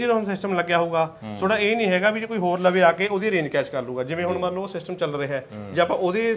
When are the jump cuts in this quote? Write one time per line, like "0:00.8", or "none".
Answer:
none